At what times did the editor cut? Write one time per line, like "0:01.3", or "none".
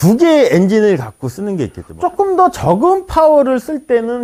0:01.8